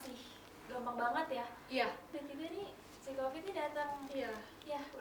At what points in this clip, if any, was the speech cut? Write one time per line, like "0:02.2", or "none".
0:02.2